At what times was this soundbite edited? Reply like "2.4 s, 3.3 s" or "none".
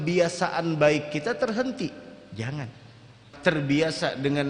3.2 s